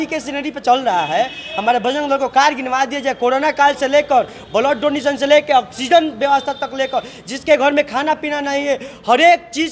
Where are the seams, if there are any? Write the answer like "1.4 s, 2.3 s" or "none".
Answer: none